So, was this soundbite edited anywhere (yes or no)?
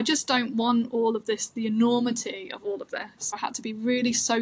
yes